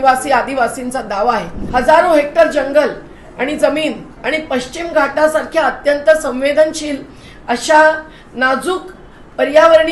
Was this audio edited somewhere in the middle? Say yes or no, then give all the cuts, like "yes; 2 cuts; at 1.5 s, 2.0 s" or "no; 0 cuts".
yes; 1 cut; at 1.5 s